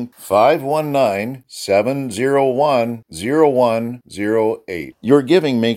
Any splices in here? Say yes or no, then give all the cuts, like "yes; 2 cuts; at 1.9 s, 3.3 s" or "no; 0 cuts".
no; 0 cuts